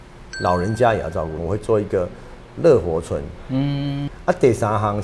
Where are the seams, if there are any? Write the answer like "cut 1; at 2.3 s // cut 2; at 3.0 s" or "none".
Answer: cut 1; at 1.4 s // cut 2; at 4.1 s